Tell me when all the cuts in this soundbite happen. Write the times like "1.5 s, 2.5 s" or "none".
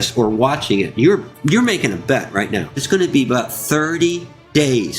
2.8 s